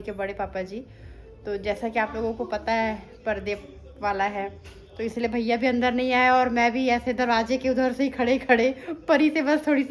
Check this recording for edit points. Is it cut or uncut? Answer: uncut